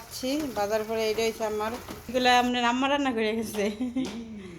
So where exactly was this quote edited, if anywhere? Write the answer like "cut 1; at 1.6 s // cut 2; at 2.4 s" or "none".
cut 1; at 2.1 s

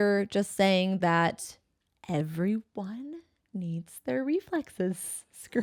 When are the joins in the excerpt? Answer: none

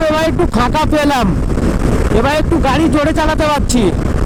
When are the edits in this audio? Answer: none

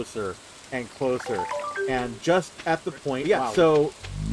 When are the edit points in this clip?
cut 1; at 3.2 s

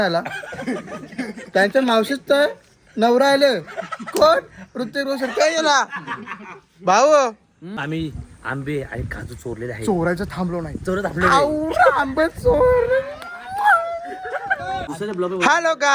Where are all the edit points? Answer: cut 1; at 7.8 s // cut 2; at 14.9 s

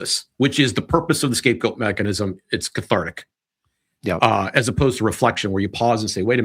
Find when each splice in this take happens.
none

